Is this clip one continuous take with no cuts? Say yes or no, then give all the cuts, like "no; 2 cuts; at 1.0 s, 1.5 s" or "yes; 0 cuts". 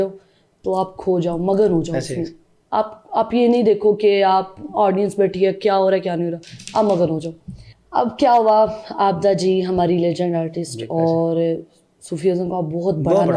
yes; 0 cuts